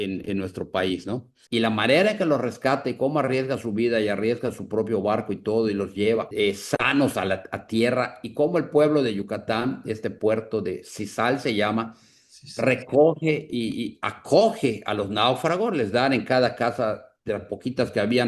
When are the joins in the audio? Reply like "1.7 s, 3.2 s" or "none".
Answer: 1.3 s, 6.3 s